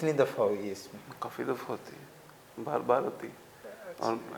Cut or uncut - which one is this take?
uncut